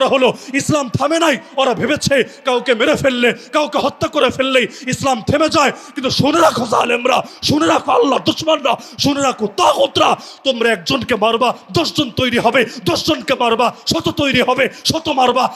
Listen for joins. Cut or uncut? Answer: uncut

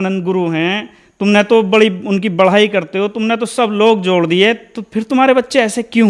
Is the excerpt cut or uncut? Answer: uncut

